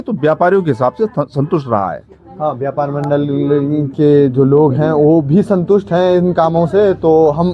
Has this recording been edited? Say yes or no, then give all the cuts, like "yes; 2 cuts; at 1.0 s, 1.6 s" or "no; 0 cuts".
no; 0 cuts